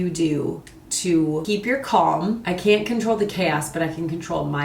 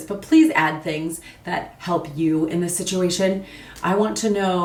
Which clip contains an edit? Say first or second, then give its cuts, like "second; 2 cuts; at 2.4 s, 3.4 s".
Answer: first; 2 cuts; at 1.4 s, 2.4 s